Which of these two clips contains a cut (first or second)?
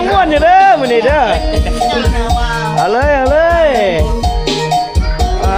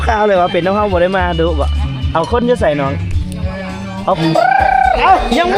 second